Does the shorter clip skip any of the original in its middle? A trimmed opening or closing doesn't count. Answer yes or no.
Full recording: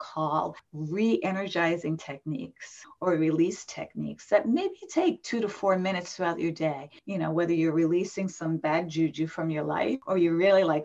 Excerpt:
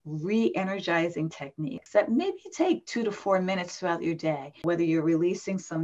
yes